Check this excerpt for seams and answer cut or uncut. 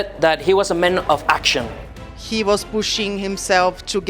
cut